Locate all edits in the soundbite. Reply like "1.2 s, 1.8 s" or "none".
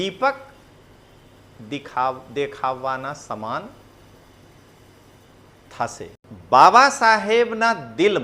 6.3 s

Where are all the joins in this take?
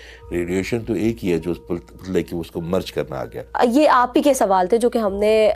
3.5 s

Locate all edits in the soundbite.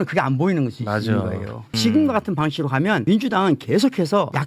1.7 s

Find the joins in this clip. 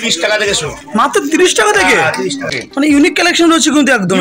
2.6 s

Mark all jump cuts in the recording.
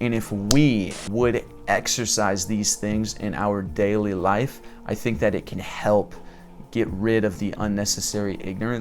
1.0 s

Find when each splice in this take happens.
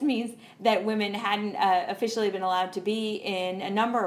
none

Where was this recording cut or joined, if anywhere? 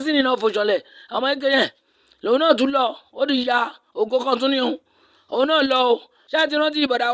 6.2 s

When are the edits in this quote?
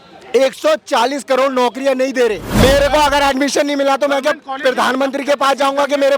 2.5 s

